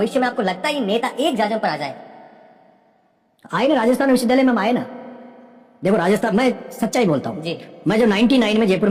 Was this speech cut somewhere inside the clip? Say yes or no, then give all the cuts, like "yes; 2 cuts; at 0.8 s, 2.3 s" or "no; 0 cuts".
no; 0 cuts